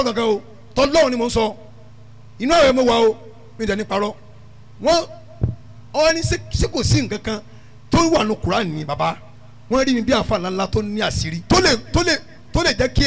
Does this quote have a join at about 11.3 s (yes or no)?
yes